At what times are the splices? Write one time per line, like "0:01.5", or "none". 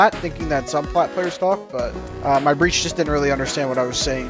0:02.0